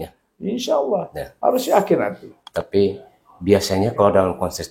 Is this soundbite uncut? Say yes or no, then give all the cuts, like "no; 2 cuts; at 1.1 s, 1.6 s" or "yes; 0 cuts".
yes; 0 cuts